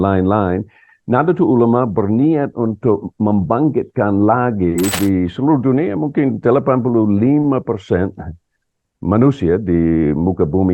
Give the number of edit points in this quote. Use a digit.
1